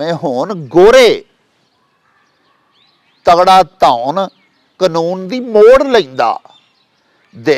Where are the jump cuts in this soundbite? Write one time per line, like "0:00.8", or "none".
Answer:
none